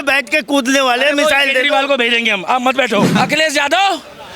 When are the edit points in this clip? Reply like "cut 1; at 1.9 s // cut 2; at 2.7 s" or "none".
cut 1; at 3.1 s

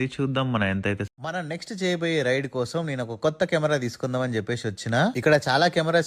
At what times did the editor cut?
cut 1; at 1.1 s

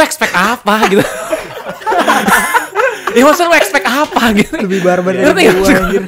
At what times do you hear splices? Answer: none

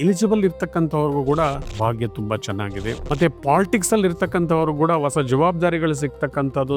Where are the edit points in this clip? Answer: cut 1; at 1.7 s // cut 2; at 3.0 s

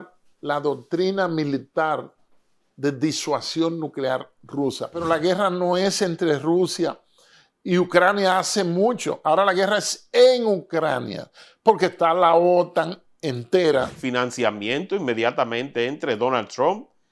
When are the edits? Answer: cut 1; at 5.0 s // cut 2; at 14.0 s

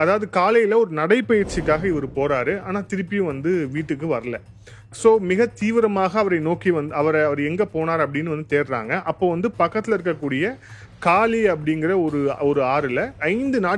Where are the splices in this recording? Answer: none

